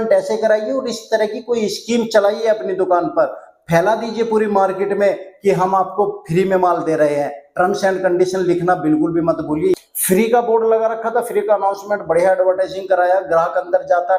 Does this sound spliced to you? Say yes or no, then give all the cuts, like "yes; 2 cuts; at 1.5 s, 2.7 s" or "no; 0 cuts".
yes; 1 cut; at 9.7 s